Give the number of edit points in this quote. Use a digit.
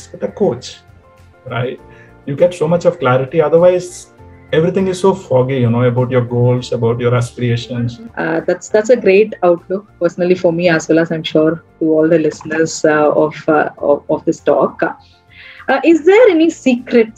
1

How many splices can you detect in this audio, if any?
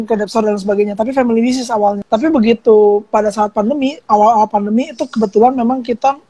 1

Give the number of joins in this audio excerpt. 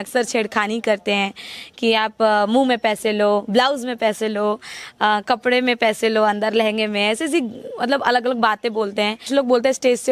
1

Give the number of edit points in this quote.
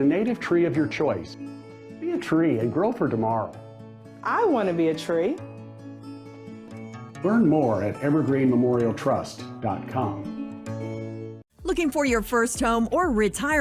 1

